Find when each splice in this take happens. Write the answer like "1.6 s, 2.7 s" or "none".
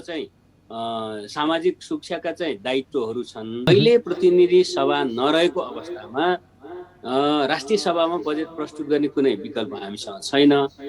3.7 s